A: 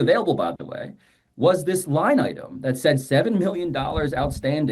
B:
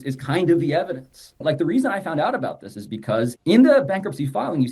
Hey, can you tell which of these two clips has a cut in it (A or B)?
B